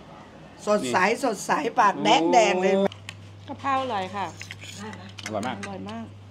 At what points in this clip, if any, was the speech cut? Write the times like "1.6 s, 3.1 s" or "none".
2.9 s

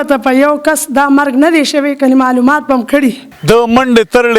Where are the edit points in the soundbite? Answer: 3.3 s

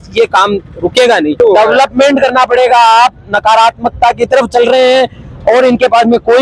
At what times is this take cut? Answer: 1.3 s

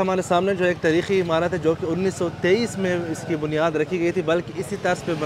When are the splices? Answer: none

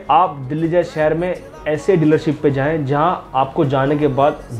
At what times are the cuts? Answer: none

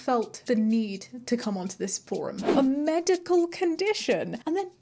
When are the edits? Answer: 2.4 s

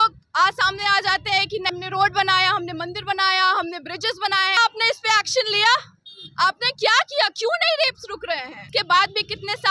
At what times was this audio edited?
1.7 s, 4.6 s, 8.6 s

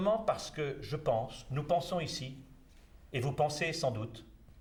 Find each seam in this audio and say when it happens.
none

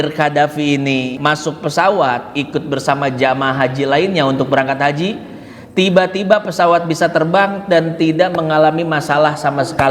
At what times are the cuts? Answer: 1.1 s

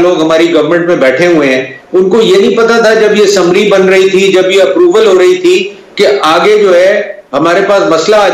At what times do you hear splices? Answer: none

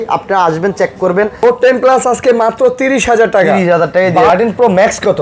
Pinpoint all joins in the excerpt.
1.4 s, 4.3 s

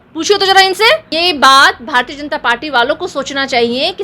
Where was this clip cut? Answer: 1.1 s

